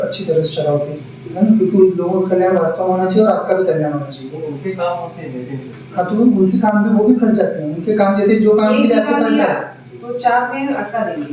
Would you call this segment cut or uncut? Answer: uncut